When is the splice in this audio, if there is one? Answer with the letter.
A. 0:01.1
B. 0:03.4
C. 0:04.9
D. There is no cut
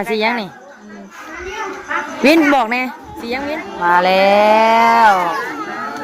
B